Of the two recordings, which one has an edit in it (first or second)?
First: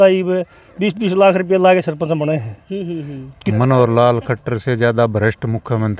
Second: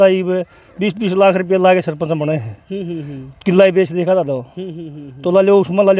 first